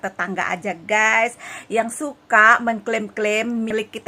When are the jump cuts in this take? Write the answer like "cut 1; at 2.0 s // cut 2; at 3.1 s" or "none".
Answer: none